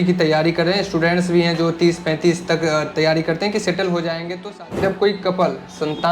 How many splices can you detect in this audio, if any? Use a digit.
1